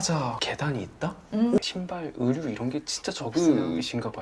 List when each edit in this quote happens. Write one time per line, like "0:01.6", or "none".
0:01.6